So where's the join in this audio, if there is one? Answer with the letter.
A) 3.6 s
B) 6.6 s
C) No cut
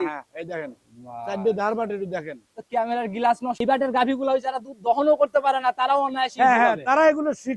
A